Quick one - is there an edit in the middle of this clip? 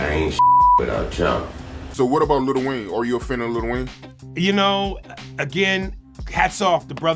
yes; 1 cut; at 1.8 s

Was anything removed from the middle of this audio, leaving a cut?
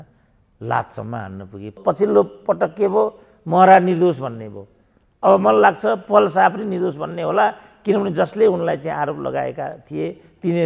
yes; 1 cut; at 1.8 s

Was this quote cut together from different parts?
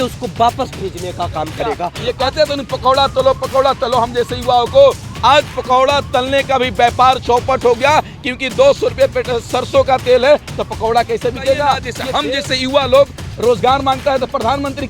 yes; 2 cuts; at 2.0 s, 12.0 s

